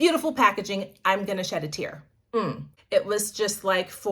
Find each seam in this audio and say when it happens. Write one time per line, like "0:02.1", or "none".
0:02.7